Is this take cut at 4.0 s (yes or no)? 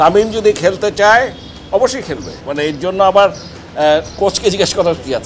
no